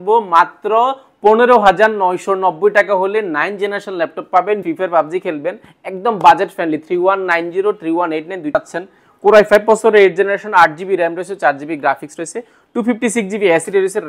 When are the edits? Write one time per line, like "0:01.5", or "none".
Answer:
0:04.6
0:08.6